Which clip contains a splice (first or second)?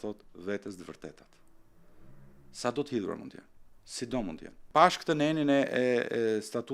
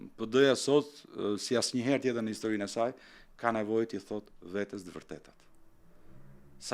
first